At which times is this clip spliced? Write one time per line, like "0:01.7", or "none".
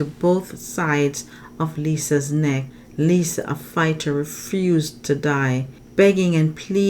0:02.8
0:05.7